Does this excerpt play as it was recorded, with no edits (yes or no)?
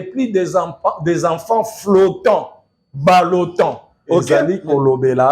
no